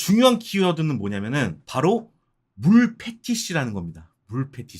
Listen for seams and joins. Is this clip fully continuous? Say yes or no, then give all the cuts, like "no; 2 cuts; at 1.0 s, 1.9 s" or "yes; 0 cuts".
no; 1 cut; at 1.6 s